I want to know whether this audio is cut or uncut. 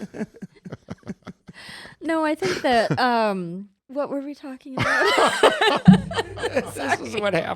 cut